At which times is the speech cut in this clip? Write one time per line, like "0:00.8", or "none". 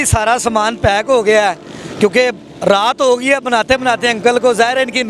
none